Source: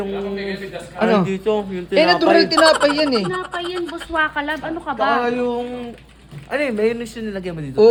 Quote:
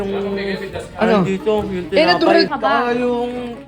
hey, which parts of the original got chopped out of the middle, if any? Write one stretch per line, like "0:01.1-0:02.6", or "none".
0:02.5-0:04.9

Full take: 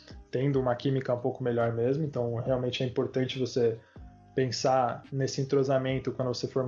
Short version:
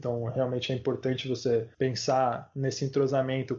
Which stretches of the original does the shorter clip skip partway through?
0:03.8-0:04.3

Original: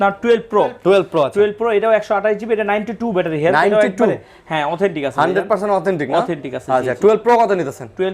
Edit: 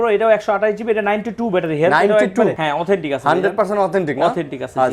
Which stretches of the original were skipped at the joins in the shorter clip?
0:04.2-0:04.5

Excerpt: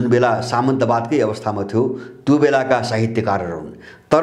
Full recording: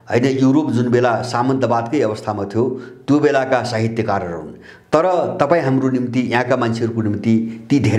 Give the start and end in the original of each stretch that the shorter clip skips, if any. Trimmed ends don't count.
none

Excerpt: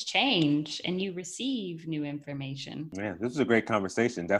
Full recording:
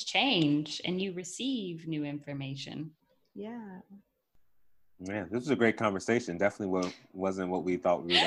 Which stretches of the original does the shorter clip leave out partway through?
0:02.9-0:05.0

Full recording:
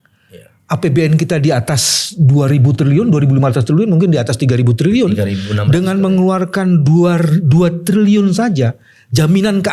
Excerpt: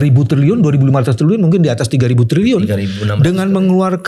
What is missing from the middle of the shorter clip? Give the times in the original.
none

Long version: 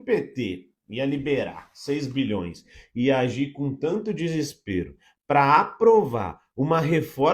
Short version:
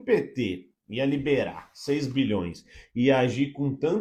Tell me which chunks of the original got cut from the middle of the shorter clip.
none

